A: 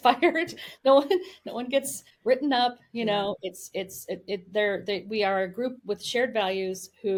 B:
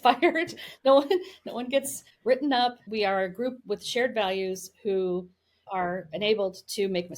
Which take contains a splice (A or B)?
B